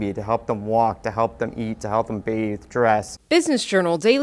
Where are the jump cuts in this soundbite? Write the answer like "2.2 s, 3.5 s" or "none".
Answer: 3.1 s